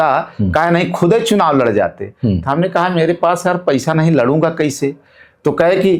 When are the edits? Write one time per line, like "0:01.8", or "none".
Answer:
none